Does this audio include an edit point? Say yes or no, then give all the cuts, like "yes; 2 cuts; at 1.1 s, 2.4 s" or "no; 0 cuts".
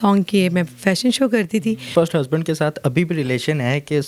yes; 1 cut; at 1.9 s